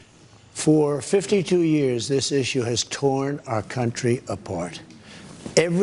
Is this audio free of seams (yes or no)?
no